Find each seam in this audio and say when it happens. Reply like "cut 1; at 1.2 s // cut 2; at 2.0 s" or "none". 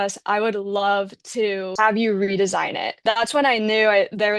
cut 1; at 1.7 s // cut 2; at 3.0 s